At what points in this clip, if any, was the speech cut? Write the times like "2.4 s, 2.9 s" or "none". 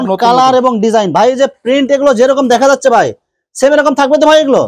none

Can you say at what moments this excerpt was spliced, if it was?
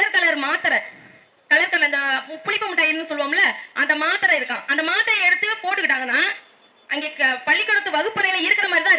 none

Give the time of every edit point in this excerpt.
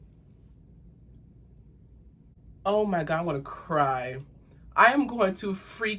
2.4 s

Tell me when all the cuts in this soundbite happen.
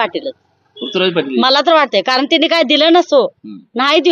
none

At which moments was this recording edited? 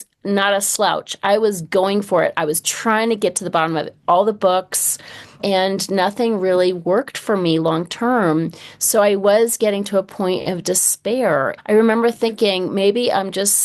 11.6 s

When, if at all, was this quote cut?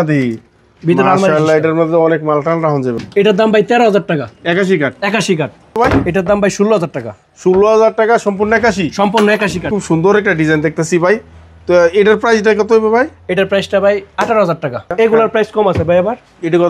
3.0 s, 5.8 s, 9.7 s, 14.9 s

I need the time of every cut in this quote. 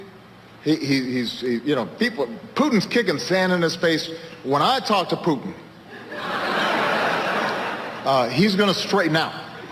none

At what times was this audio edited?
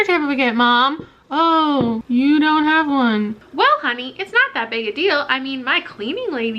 2.0 s, 3.4 s

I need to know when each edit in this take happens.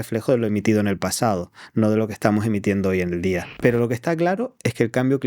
3.5 s

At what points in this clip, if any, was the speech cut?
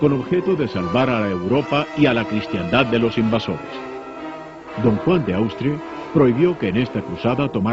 none

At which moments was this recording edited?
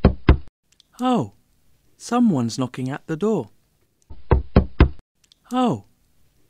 4.2 s

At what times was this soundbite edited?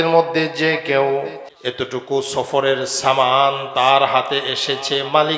1.4 s

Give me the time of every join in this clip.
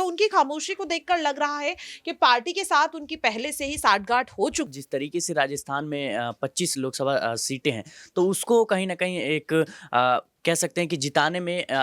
4.7 s

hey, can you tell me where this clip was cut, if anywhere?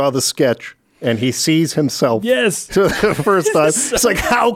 none

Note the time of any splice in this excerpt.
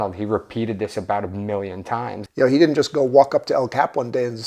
2.2 s

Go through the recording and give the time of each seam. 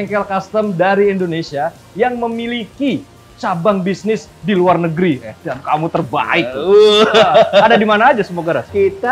none

